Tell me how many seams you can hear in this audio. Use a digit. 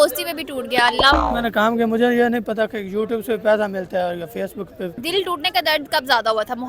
2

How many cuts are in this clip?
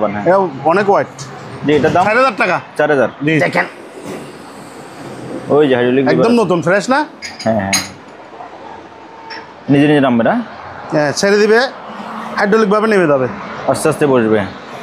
1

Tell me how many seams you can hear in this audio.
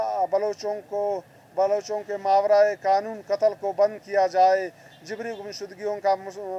0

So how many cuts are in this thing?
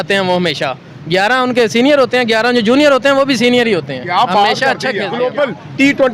1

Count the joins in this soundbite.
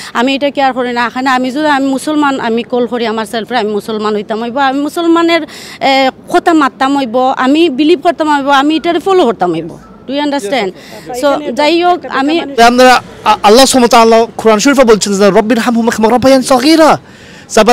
1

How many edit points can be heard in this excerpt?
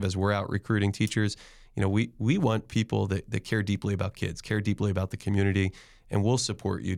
0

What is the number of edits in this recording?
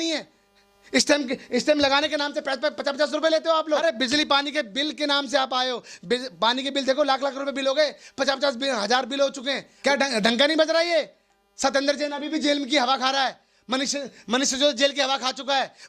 2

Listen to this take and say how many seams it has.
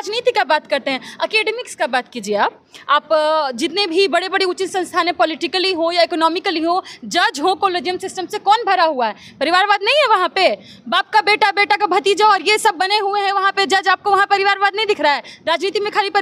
0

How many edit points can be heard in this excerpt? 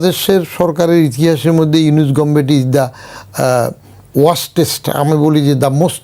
0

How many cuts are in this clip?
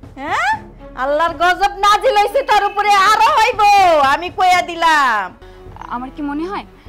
1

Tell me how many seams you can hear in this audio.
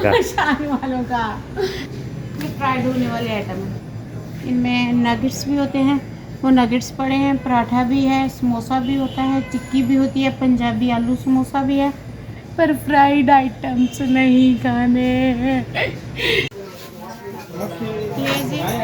2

